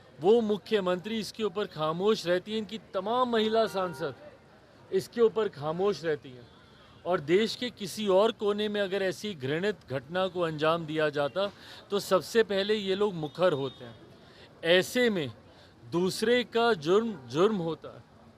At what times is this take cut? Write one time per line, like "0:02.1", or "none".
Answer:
none

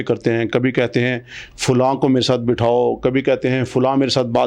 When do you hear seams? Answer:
none

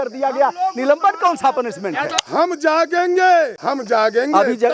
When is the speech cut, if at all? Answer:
0:02.1
0:03.6

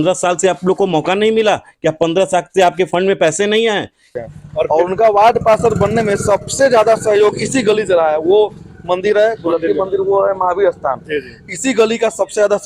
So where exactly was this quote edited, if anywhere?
0:04.1

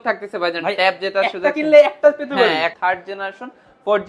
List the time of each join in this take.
0:02.7

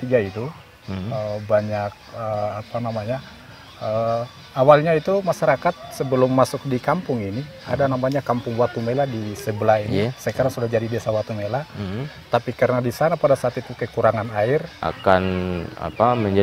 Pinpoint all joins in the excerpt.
0:14.8

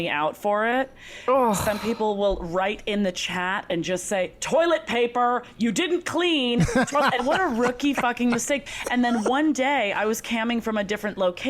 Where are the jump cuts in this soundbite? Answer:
0:07.2
0:08.6

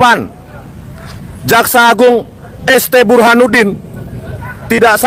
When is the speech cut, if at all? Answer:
none

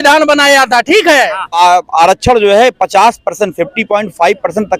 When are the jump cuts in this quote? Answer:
0:01.6

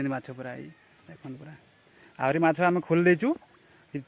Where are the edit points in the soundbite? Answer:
none

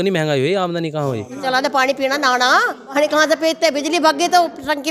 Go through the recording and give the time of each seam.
0:01.4
0:02.9

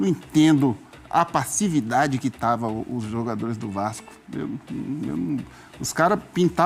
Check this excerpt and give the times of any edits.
none

